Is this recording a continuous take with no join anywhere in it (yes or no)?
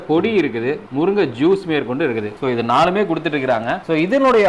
yes